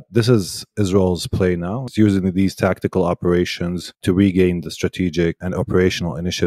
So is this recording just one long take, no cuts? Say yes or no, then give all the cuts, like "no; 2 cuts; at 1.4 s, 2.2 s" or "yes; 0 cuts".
no; 3 cuts; at 1.8 s, 4.0 s, 5.4 s